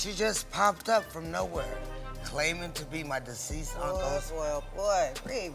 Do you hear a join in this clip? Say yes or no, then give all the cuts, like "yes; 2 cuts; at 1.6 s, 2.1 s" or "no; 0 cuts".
no; 0 cuts